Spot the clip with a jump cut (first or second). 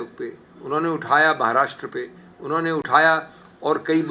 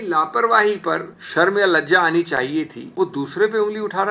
second